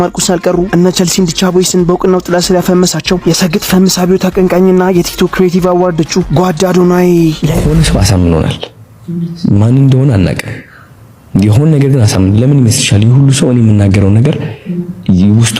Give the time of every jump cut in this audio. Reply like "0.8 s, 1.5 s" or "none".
7.5 s